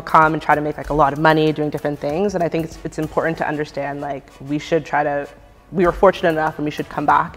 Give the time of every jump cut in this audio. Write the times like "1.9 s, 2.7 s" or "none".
none